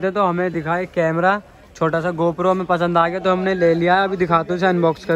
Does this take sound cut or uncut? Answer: uncut